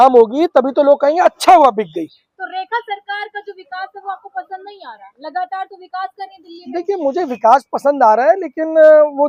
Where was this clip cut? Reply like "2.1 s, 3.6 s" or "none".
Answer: none